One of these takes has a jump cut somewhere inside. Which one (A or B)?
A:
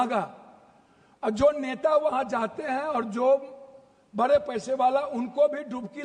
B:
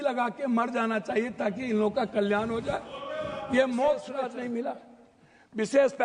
B